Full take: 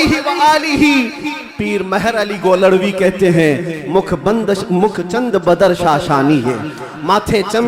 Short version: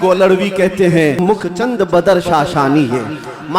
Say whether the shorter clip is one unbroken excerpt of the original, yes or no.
no